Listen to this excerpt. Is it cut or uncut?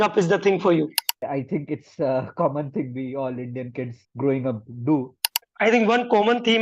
cut